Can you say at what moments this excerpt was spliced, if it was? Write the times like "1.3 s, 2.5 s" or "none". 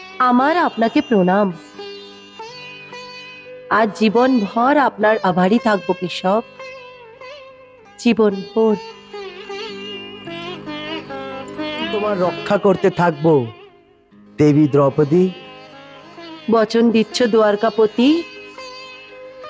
12.0 s